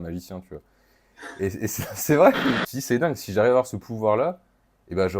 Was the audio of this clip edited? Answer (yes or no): yes